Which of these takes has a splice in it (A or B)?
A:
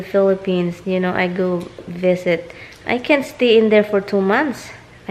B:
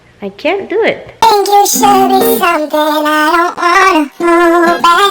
B